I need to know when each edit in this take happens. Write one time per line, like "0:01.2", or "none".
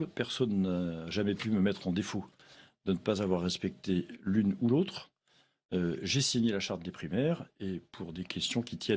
0:05.9